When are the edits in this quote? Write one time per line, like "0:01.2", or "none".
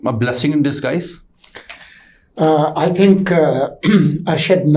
none